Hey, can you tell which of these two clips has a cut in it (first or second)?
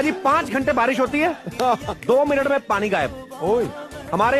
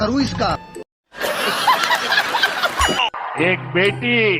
second